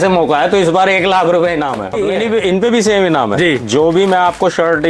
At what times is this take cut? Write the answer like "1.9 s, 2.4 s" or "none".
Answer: 2.0 s